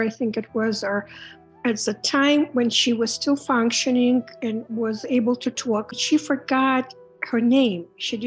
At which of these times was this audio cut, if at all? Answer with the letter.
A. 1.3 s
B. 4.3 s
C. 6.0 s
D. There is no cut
C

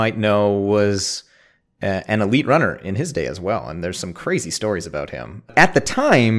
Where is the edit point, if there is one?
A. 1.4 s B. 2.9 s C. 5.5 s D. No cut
C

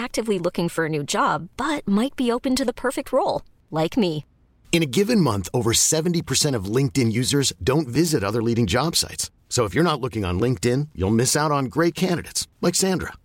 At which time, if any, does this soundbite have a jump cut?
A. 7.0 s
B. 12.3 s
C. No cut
C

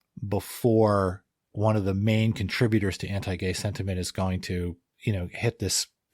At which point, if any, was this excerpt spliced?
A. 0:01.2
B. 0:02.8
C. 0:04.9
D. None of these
C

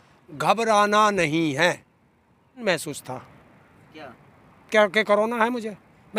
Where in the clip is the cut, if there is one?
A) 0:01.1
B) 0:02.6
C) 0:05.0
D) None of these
B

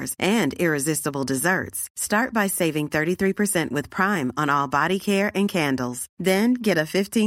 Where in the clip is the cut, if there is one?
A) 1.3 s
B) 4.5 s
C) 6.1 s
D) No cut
D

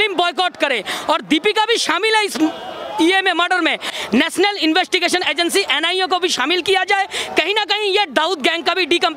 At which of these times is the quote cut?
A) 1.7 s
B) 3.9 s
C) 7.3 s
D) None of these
B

